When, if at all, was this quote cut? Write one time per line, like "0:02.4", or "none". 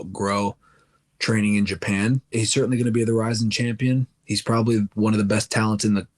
0:02.3
0:04.2